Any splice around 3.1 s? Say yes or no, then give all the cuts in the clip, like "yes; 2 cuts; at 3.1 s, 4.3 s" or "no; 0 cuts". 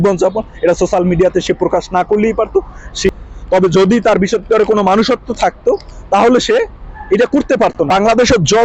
yes; 2 cuts; at 3.1 s, 7.9 s